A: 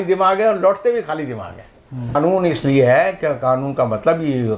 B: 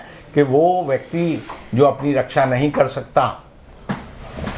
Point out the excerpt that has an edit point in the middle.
A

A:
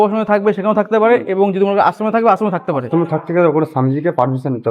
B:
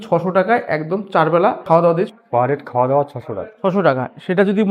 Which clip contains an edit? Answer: B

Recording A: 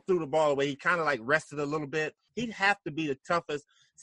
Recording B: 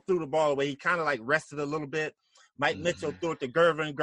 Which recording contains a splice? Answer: A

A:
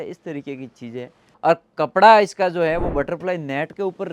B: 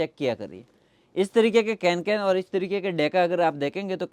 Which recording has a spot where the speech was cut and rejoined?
A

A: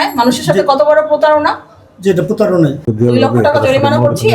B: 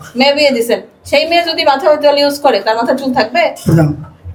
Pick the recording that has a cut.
A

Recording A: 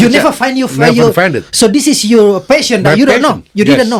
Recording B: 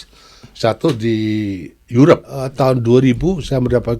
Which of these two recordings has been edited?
B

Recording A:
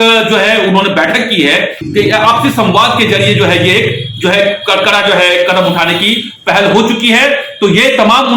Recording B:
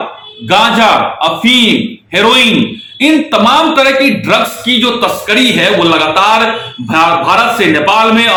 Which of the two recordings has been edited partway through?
A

